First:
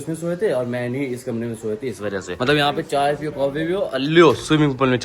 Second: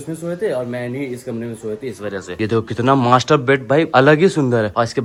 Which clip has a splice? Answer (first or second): first